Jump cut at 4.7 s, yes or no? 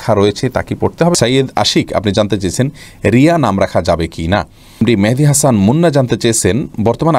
yes